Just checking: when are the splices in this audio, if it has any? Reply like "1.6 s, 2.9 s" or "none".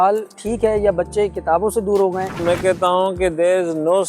2.4 s